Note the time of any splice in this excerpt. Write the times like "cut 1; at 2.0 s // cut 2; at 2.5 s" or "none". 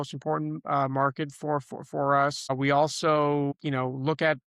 cut 1; at 2.5 s // cut 2; at 3.6 s